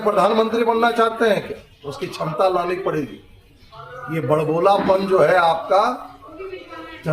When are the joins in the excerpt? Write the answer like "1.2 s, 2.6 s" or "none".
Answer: none